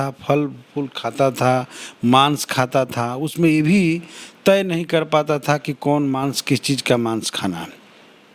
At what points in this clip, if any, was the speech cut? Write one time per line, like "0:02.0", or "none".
none